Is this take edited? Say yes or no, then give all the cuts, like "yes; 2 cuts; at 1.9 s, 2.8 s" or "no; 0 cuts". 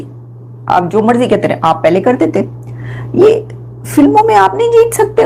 no; 0 cuts